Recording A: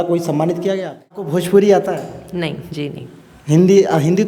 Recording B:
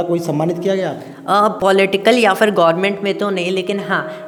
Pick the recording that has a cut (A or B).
A